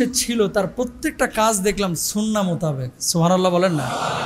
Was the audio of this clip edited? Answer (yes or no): no